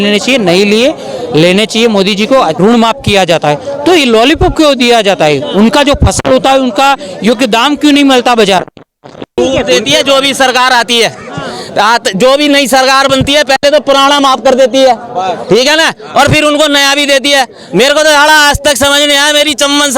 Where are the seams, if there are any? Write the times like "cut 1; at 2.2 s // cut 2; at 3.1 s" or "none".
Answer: cut 1; at 2.6 s // cut 2; at 9.3 s